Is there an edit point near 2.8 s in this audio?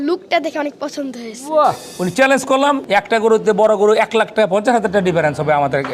yes; 2 cuts; at 1.9 s, 2.8 s

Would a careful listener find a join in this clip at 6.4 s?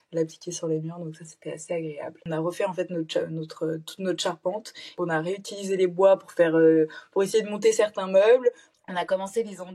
no; 3 cuts; at 2.3 s, 5.0 s, 8.7 s

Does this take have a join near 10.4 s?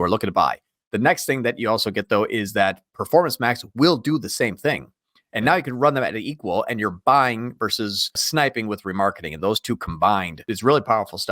yes; 2 cuts; at 8.2 s, 10.4 s

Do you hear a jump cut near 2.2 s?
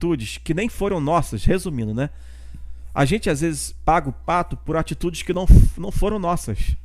no; 0 cuts

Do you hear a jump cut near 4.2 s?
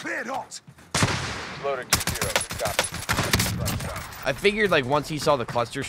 yes; 1 cut; at 4.2 s

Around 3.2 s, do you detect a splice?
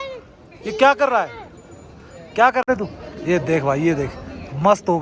no; 0 cuts

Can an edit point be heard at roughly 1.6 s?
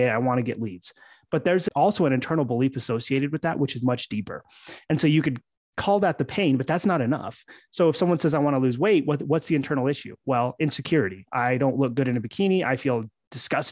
yes; 1 cut; at 1.6 s

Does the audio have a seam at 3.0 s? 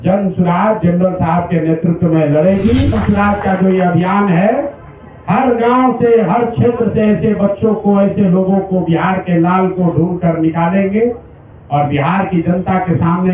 yes; 1 cut; at 3.0 s

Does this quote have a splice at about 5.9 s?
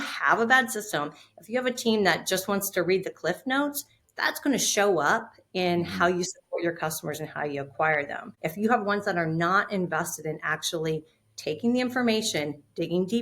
no; 1 cut; at 8.2 s

